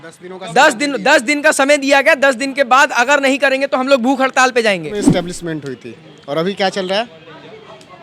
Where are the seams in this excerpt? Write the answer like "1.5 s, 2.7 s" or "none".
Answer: 4.9 s

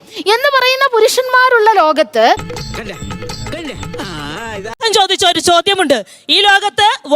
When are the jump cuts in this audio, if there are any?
2.4 s, 4.8 s

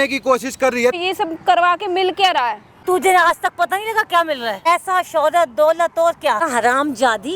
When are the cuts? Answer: 1.0 s, 2.7 s, 4.7 s, 6.5 s

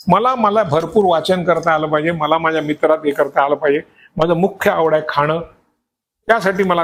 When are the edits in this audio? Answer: none

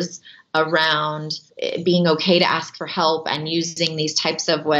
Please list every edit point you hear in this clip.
1.5 s

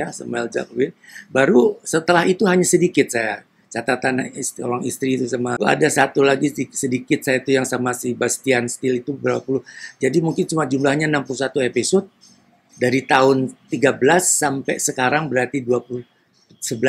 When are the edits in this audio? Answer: 5.6 s

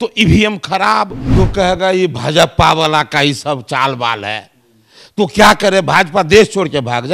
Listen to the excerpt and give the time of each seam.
1.2 s

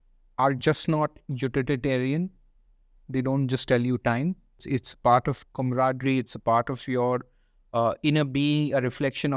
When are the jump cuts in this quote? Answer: 4.6 s

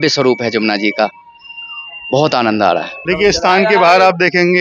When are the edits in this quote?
3.1 s

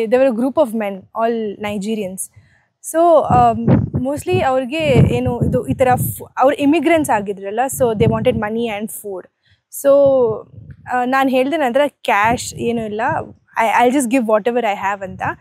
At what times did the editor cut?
none

